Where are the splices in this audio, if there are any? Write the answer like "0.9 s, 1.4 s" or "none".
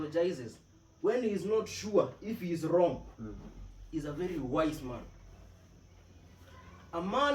none